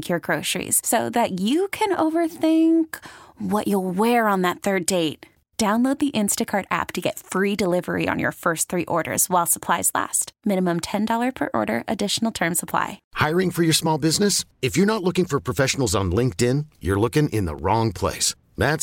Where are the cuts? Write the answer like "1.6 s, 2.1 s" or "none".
13.0 s